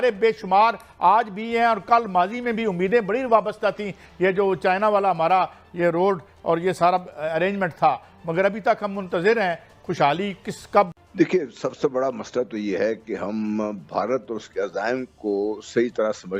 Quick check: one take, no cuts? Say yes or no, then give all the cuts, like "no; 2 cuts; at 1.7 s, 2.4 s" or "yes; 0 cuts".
yes; 0 cuts